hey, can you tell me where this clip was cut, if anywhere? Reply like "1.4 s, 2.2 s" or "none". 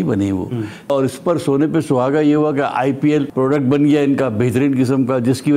0.9 s, 3.3 s